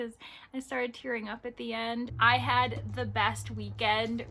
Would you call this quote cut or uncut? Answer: cut